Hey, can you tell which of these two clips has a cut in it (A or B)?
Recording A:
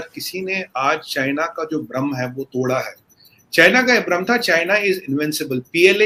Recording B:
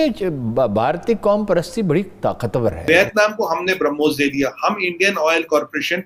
B